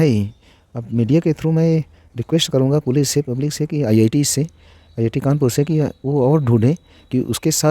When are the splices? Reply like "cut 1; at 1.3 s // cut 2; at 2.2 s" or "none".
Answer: none